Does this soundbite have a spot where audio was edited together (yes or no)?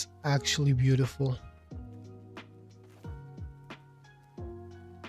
yes